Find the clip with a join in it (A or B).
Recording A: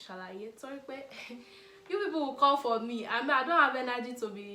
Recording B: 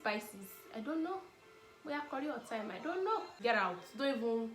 B